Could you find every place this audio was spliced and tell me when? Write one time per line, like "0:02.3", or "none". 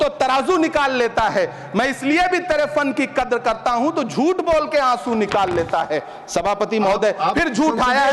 none